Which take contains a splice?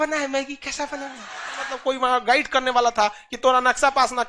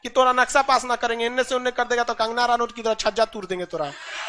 first; 1 cut; at 1.7 s

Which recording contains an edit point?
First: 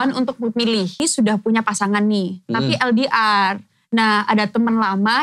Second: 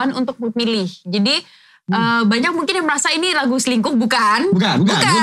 first; 1 cut; at 1.0 s

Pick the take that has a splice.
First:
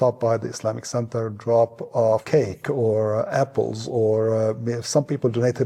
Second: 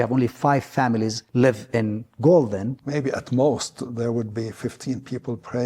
second; 1 cut; at 2.8 s

